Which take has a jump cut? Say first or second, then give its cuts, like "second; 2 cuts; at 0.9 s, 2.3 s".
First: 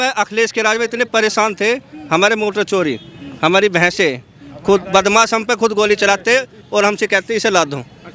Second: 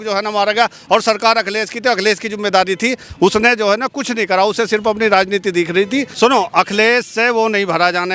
second; 1 cut; at 6.1 s